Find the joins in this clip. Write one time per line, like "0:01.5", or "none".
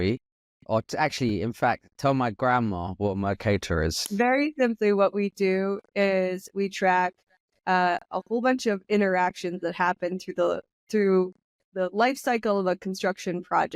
0:04.0